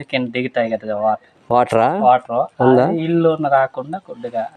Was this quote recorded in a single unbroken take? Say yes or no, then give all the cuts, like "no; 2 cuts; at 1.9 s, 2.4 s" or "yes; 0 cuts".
yes; 0 cuts